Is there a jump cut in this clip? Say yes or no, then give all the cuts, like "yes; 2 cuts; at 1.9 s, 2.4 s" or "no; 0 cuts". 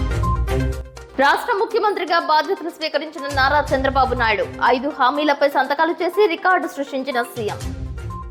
yes; 1 cut; at 1.1 s